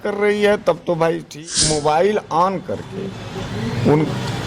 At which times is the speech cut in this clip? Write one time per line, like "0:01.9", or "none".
0:01.3